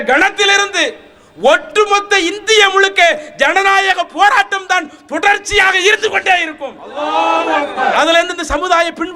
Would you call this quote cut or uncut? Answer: uncut